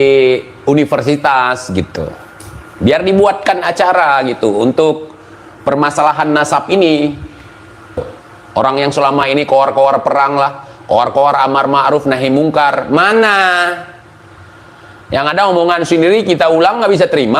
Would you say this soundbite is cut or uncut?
cut